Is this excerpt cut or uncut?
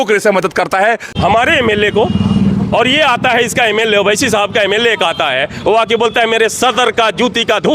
cut